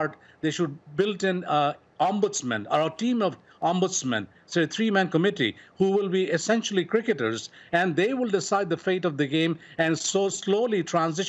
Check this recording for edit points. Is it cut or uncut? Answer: uncut